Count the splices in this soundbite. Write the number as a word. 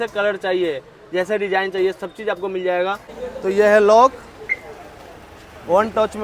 one